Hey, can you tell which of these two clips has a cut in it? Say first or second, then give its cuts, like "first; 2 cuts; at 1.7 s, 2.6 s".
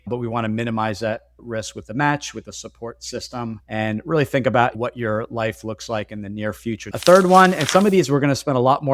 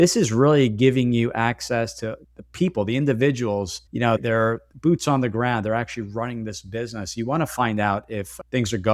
first; 1 cut; at 6.8 s